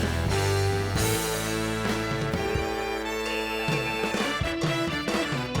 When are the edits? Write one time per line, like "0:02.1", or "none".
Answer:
0:04.1